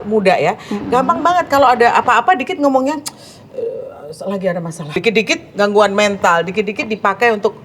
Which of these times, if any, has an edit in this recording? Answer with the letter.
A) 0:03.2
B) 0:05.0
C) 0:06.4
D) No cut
B